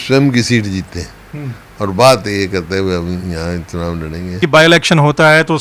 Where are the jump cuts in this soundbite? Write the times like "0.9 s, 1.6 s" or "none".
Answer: 4.4 s